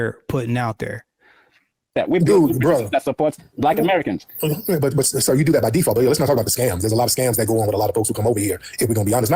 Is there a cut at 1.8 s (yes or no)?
yes